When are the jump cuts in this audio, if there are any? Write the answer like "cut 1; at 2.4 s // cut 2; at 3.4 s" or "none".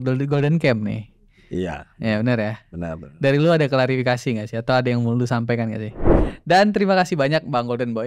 cut 1; at 6.2 s